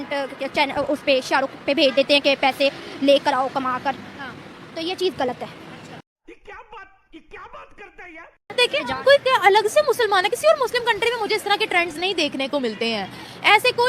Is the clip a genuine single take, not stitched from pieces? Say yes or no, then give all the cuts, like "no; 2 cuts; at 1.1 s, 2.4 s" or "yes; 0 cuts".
yes; 0 cuts